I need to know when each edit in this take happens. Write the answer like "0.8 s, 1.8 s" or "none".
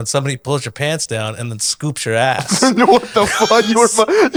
none

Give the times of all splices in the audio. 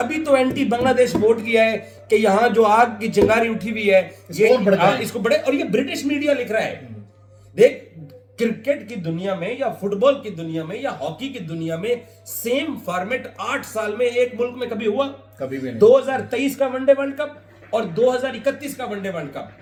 none

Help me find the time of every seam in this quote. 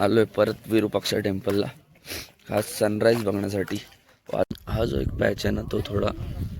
4.4 s

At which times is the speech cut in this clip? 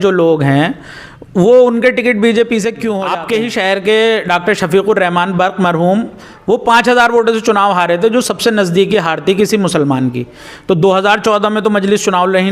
3.1 s

